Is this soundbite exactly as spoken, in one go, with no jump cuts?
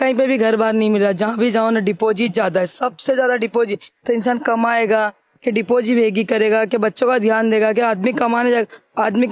yes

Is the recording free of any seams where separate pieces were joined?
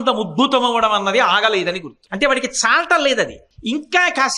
no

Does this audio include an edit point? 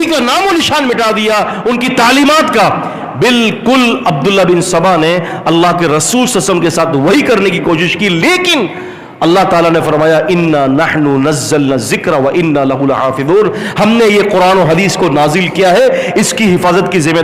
no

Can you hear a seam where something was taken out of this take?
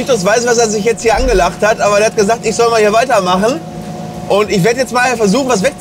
no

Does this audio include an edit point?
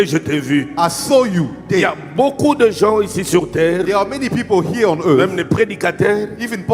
no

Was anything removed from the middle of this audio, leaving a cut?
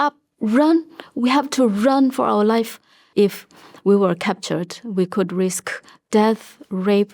yes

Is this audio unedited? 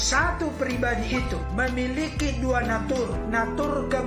yes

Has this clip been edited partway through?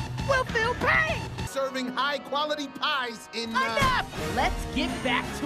yes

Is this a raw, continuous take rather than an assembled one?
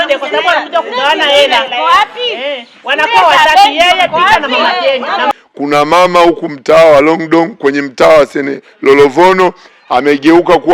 no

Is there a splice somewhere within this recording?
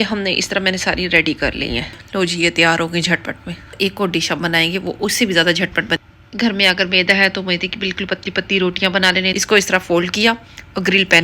yes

